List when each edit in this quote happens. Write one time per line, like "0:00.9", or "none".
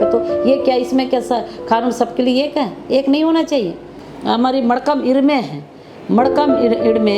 0:04.0